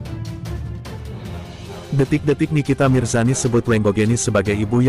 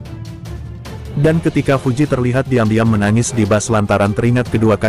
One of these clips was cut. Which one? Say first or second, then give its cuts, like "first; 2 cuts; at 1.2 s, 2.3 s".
second; 1 cut; at 1.1 s